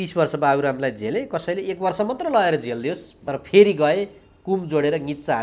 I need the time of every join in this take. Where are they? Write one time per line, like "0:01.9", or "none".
0:03.1